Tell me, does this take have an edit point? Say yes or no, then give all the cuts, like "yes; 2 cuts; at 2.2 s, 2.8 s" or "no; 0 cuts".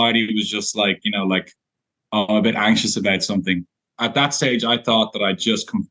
yes; 1 cut; at 3.8 s